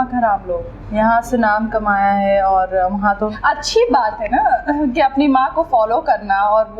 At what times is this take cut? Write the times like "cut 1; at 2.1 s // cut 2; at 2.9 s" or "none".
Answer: cut 1; at 3.4 s